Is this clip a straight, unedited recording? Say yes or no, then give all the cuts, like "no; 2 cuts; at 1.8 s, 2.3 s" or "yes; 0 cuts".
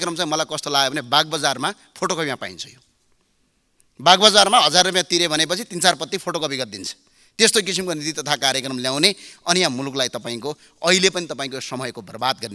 yes; 0 cuts